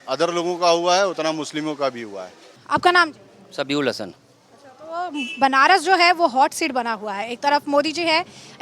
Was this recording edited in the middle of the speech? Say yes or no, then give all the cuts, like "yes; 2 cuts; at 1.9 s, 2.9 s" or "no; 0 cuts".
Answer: no; 0 cuts